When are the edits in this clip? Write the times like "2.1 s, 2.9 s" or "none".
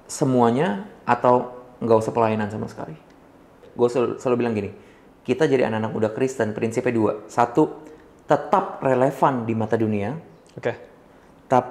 3.6 s